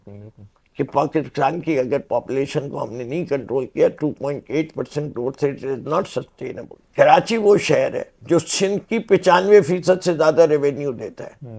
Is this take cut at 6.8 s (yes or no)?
yes